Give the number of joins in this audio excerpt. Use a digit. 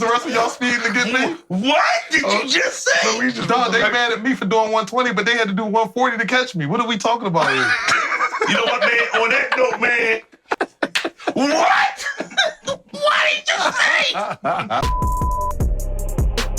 2